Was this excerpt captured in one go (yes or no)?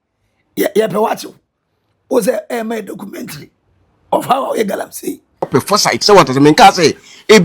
no